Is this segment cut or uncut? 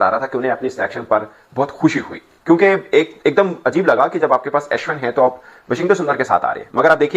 uncut